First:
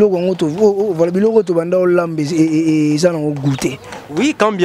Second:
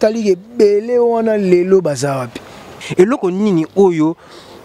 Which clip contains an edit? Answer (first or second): second